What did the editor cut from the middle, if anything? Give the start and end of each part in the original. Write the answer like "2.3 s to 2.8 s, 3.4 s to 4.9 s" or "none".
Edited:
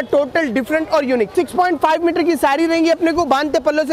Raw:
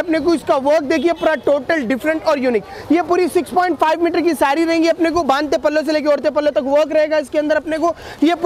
2.7 s to 3.3 s